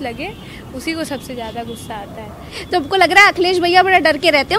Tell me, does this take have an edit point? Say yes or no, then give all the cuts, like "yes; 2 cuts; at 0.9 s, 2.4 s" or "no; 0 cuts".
yes; 1 cut; at 2.6 s